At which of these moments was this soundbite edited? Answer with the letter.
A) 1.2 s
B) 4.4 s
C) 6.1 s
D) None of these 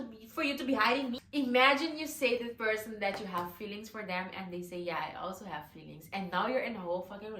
A